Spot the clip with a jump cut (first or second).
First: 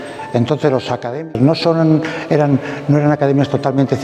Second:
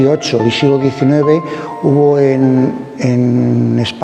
first